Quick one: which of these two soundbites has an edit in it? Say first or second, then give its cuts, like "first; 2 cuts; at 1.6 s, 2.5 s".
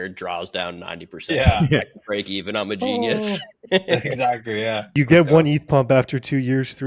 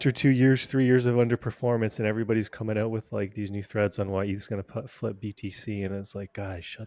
first; 1 cut; at 4.9 s